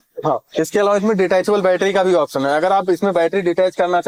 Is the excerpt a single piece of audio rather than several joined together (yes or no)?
yes